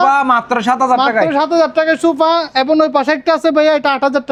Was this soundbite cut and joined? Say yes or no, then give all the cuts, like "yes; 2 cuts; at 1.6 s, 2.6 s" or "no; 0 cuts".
no; 0 cuts